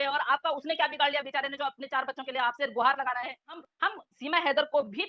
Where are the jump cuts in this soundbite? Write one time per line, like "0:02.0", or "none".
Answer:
0:03.6